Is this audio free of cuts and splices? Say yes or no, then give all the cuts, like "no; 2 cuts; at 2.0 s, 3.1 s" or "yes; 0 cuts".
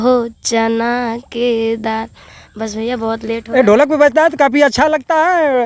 yes; 0 cuts